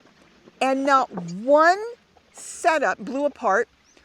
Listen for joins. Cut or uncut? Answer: cut